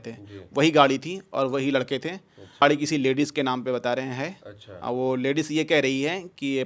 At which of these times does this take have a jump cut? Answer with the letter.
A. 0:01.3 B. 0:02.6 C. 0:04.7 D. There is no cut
B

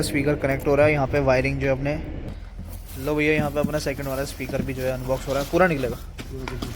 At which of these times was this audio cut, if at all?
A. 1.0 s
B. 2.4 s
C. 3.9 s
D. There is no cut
B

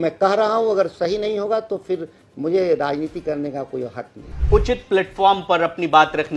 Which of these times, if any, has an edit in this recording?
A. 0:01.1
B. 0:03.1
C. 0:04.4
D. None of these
C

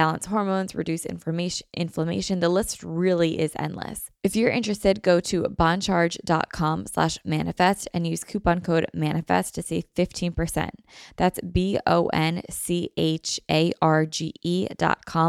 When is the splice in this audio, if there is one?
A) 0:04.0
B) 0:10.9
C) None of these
A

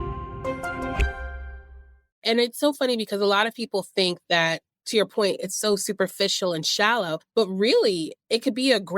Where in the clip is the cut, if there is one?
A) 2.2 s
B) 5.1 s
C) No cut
A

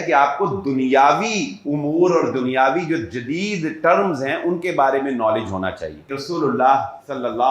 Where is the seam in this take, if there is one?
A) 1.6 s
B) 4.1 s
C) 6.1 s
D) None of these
C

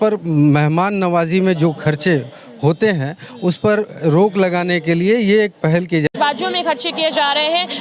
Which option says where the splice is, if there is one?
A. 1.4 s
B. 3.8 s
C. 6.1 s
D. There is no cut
C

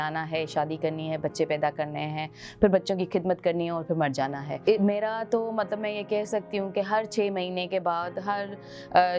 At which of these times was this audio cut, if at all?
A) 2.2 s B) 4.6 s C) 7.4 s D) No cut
B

